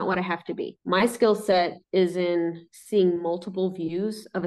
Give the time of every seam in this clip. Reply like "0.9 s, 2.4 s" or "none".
none